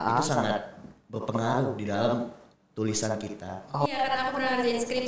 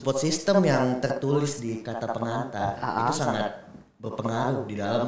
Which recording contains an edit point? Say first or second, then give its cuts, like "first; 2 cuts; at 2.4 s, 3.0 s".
first; 1 cut; at 3.8 s